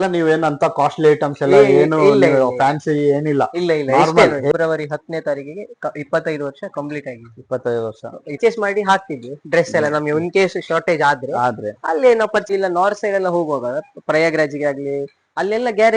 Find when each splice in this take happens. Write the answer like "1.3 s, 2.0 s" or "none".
4.5 s, 8.4 s, 12.5 s